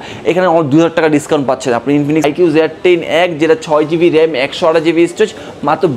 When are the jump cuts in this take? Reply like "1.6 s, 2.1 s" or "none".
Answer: 2.2 s